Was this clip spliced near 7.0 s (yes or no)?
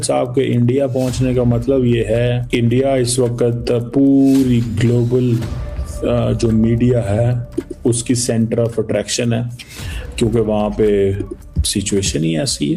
no